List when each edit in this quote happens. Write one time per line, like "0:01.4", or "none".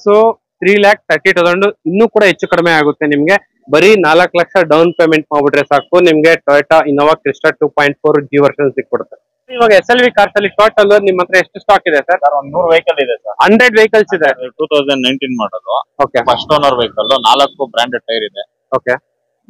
0:03.5
0:09.6
0:14.6